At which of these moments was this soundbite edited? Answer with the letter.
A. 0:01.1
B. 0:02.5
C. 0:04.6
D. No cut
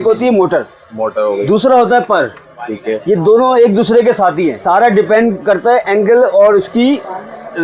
C